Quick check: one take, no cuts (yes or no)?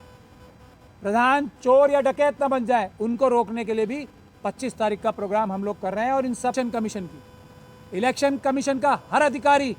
no